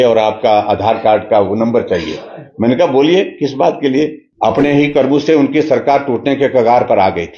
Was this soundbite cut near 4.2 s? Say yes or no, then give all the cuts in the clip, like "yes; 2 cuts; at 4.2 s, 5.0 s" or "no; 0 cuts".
yes; 1 cut; at 4.2 s